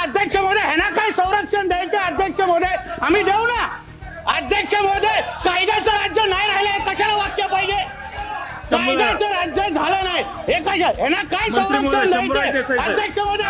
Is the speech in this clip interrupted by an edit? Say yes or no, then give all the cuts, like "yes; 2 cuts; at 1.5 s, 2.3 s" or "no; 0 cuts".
no; 0 cuts